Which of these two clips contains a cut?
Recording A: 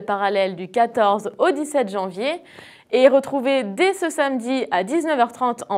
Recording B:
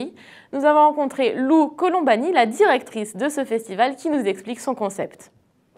B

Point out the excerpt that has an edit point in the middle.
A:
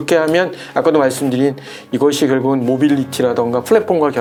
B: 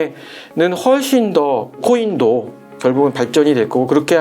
B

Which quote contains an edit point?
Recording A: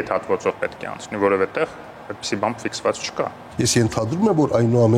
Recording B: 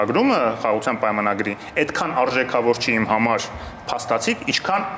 A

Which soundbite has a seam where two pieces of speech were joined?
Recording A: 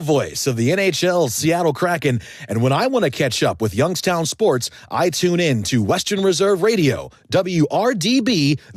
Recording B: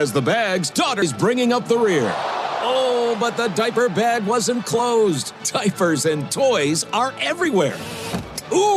B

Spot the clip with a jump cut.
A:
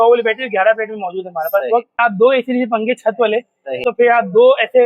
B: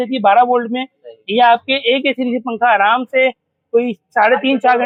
A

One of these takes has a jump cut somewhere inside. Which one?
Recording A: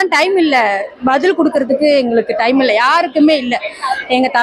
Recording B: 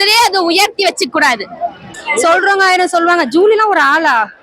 B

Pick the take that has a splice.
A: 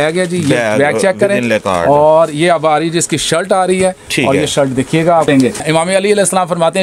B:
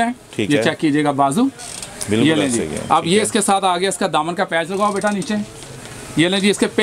A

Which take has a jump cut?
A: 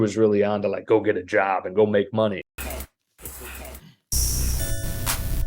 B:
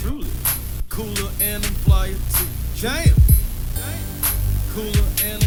A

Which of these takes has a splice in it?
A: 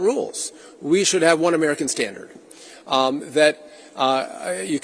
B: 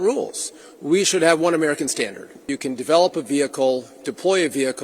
B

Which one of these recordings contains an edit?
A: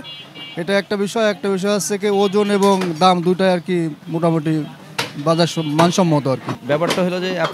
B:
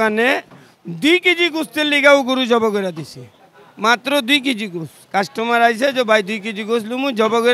A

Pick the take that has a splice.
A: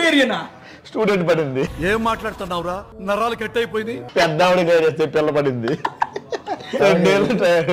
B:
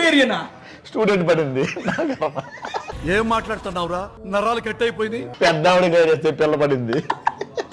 A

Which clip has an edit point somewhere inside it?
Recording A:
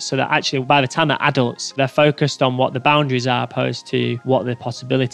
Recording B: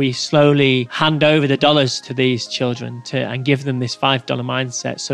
A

